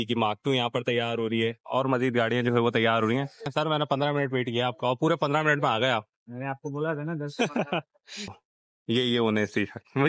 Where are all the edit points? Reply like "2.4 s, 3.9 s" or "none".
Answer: 3.5 s, 8.2 s